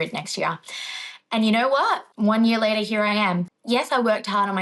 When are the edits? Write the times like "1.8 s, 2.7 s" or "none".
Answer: 2.1 s, 3.5 s